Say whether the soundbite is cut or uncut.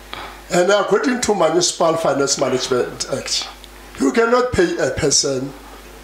uncut